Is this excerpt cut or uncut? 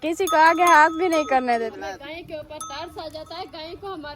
cut